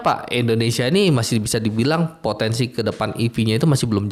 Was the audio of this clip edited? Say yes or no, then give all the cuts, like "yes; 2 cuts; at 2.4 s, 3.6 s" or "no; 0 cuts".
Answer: no; 0 cuts